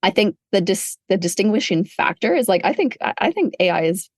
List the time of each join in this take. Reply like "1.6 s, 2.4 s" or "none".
1.1 s